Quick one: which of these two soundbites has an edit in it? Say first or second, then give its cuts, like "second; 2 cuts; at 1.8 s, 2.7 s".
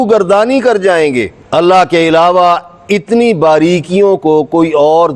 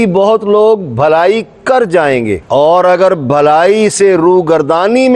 first; 1 cut; at 1.4 s